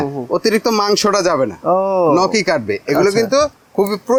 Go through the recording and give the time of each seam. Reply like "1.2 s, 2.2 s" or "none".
none